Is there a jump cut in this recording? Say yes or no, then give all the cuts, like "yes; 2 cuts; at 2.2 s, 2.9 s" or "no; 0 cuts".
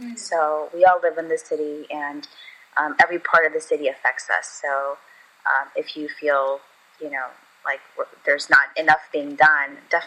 no; 0 cuts